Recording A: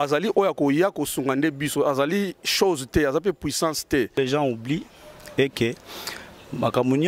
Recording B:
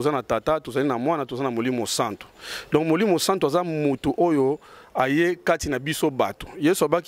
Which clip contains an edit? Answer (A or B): A